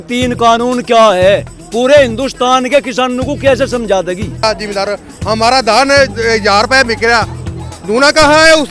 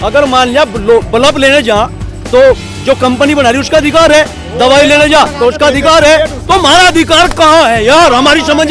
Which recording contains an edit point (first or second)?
first